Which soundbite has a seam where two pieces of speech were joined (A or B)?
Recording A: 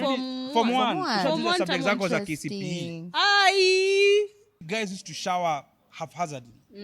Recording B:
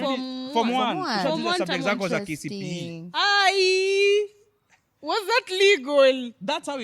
A